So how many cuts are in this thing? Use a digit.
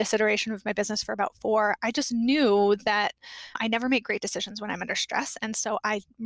1